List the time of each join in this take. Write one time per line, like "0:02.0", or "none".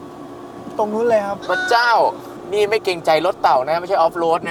none